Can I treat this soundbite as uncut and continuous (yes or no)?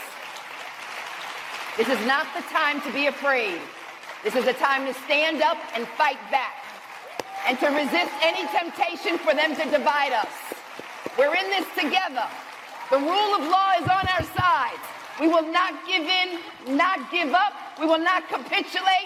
yes